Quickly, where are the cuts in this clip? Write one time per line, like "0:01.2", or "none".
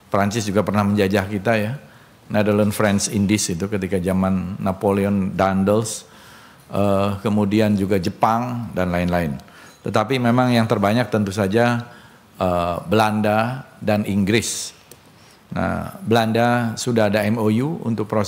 none